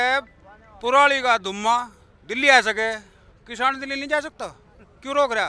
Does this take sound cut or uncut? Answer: uncut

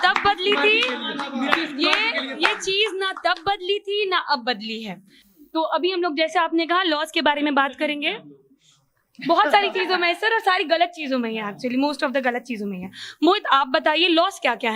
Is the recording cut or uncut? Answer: uncut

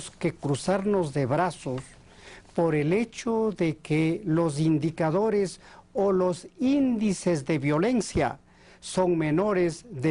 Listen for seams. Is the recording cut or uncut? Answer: cut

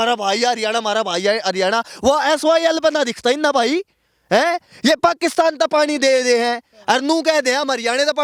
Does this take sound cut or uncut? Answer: uncut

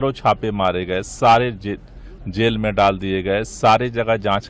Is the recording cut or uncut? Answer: uncut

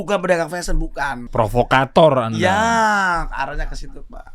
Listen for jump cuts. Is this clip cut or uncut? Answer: cut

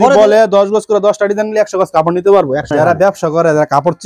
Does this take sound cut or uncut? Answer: cut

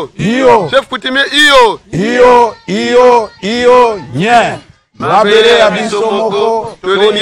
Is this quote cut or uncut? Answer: uncut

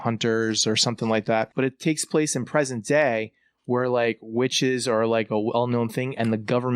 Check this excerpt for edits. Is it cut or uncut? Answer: cut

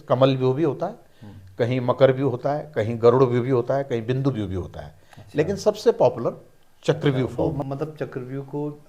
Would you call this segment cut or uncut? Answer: cut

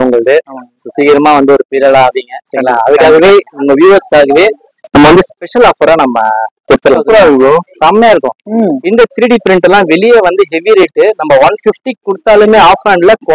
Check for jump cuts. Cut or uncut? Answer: cut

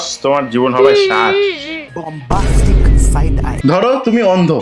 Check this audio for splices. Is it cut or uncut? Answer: cut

